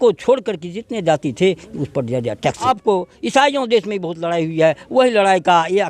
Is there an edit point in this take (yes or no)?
yes